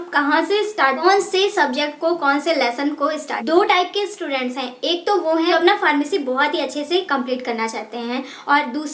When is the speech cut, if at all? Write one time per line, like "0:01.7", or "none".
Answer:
0:01.0
0:03.4
0:05.5